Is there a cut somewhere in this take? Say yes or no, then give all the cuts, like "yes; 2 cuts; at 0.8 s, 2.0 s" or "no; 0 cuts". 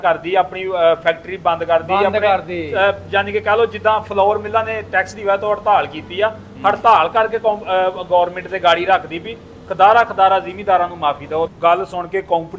yes; 1 cut; at 11.5 s